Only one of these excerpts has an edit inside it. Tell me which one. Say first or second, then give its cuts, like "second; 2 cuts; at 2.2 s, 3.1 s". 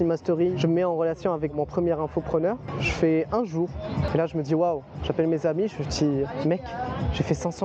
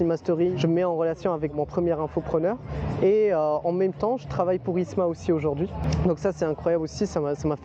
first; 2 cuts; at 2.7 s, 4.1 s